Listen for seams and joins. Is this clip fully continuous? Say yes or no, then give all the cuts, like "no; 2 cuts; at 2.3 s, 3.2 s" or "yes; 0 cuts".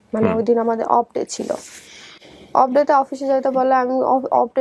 yes; 0 cuts